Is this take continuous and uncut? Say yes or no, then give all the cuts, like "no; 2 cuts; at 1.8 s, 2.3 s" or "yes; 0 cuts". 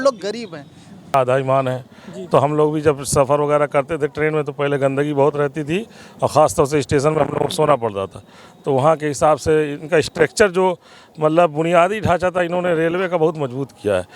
no; 1 cut; at 1.1 s